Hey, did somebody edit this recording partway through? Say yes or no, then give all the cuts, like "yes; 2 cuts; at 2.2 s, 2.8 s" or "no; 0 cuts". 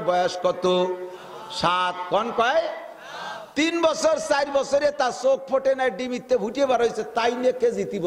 no; 0 cuts